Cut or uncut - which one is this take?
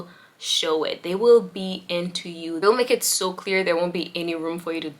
uncut